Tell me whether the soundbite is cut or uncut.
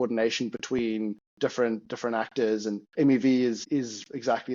cut